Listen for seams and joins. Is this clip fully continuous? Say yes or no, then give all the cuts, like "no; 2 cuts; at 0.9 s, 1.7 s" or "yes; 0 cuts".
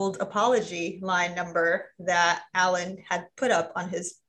yes; 0 cuts